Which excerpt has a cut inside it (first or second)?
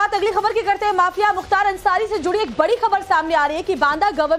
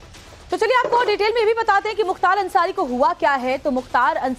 second